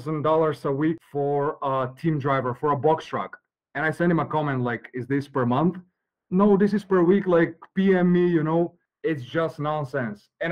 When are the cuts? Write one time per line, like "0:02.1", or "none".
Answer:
0:01.0
0:08.8